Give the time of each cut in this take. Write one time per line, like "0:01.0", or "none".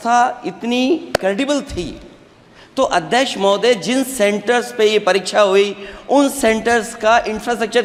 none

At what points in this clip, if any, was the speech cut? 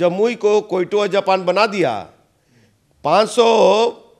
none

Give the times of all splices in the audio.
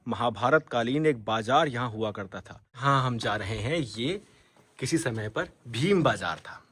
0:02.8

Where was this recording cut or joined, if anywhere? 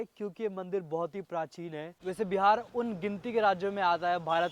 0:01.9

